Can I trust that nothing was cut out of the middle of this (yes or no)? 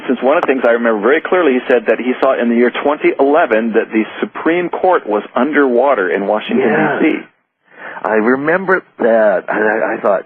no